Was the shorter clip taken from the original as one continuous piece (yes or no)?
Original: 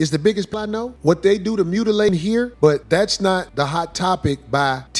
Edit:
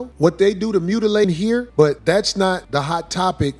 yes